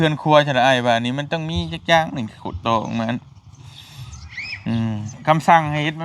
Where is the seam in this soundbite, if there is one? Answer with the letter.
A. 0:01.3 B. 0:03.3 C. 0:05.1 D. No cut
C